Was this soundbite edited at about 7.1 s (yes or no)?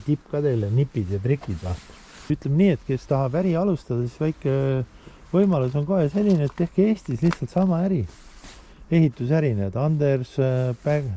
no